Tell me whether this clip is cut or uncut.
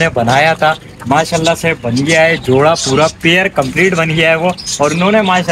uncut